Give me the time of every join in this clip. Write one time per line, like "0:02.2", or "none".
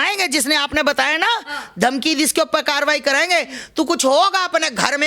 none